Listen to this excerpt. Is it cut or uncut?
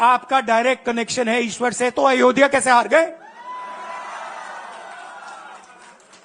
uncut